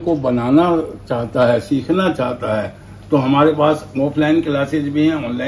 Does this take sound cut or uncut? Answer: uncut